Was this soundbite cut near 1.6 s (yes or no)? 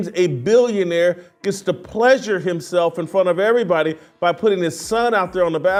no